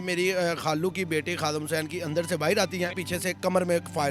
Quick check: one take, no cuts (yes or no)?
no